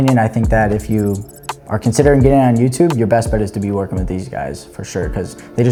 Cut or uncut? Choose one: uncut